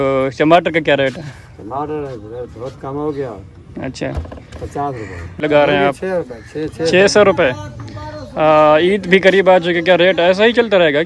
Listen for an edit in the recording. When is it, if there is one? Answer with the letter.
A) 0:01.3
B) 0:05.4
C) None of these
B